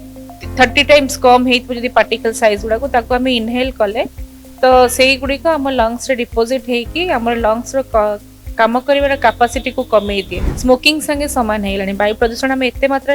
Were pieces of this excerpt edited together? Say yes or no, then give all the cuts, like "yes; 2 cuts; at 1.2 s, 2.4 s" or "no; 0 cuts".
yes; 1 cut; at 10.4 s